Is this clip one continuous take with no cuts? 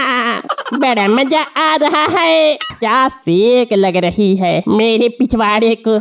no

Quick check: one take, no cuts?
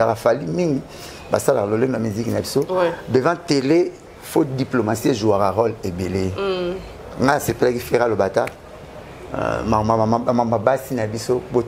yes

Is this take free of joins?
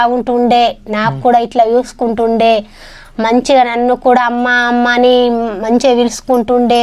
yes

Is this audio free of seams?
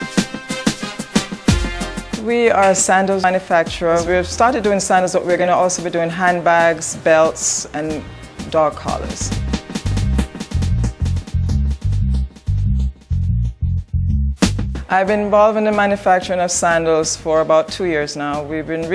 no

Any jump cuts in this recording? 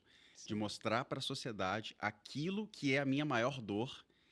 no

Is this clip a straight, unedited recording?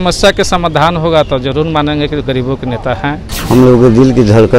no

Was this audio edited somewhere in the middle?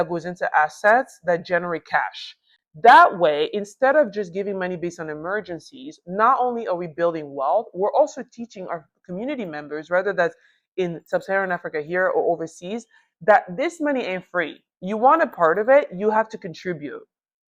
no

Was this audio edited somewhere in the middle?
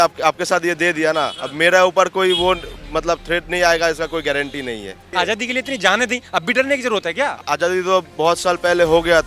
yes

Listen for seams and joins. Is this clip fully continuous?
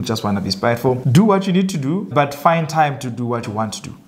no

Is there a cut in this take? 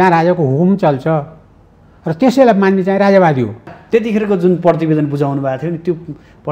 yes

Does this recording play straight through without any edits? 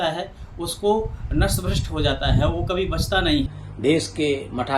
no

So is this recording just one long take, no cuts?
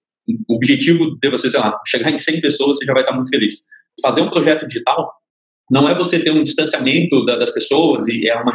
no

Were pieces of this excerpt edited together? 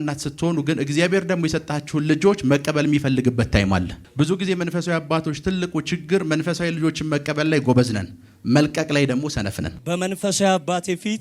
yes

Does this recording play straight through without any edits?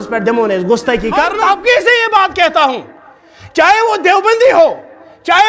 no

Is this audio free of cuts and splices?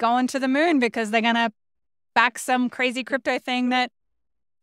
yes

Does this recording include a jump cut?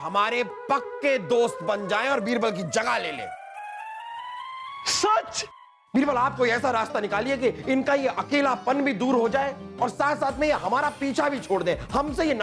yes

